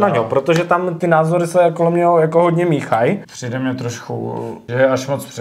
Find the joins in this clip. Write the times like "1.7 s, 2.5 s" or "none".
0.9 s, 3.3 s, 4.6 s